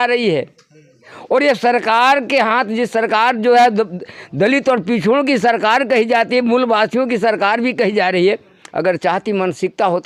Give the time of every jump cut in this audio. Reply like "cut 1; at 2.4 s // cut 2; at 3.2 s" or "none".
none